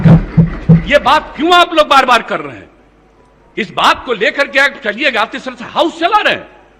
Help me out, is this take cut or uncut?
uncut